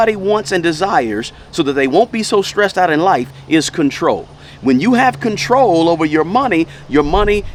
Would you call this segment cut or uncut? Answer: uncut